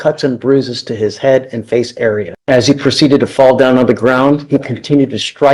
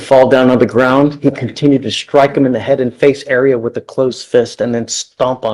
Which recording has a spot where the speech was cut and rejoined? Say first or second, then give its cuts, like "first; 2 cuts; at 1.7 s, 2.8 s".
first; 1 cut; at 2.3 s